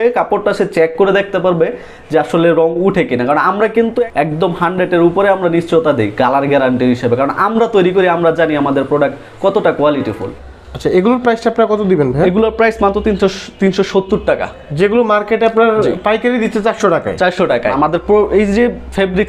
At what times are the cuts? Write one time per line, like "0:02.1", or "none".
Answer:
0:04.1
0:10.3
0:17.7

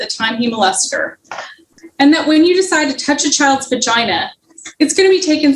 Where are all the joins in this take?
0:01.6

